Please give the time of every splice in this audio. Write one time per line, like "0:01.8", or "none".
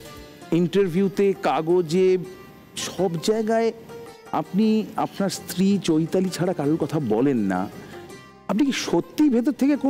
none